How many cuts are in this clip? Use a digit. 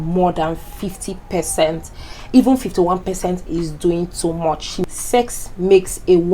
1